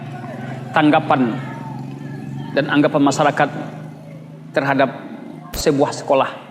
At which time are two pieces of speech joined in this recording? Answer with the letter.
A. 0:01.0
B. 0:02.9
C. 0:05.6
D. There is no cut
C